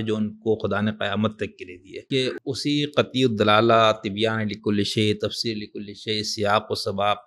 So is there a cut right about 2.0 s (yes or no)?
yes